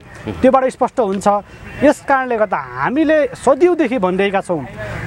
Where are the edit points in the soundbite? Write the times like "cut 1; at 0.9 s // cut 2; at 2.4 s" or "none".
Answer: none

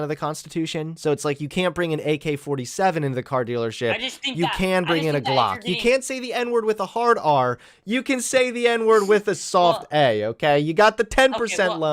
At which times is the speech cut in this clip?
none

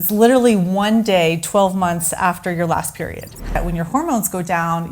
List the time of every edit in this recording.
cut 1; at 3.6 s

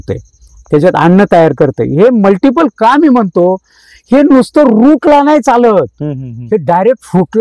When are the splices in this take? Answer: none

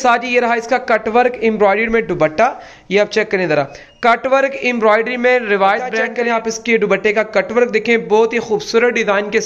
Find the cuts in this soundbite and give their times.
cut 1; at 6.1 s

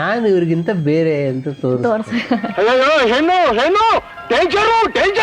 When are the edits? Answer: cut 1; at 2.5 s

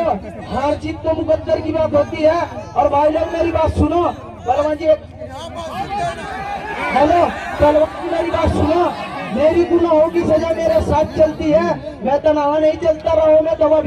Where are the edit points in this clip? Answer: none

